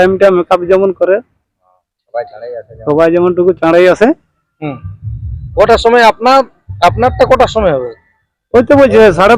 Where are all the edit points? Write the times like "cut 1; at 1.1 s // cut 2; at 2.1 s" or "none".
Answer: none